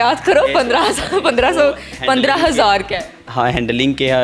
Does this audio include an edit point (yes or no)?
no